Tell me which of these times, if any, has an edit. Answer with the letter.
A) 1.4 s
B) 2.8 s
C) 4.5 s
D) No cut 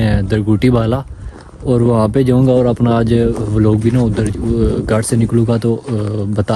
D